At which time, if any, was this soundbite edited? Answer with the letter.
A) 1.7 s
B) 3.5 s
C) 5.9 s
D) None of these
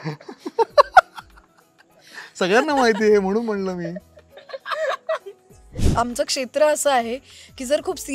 C